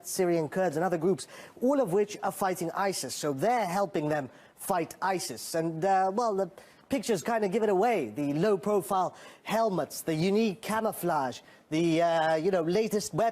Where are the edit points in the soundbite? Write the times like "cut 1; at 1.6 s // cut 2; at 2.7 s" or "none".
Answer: none